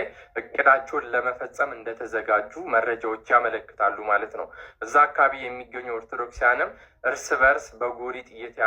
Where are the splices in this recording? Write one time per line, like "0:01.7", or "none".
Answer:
none